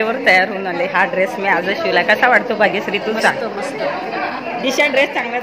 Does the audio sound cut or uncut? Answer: uncut